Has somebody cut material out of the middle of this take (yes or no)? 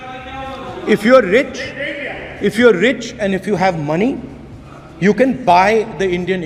no